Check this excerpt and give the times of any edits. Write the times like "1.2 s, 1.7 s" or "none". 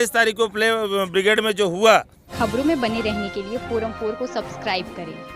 2.2 s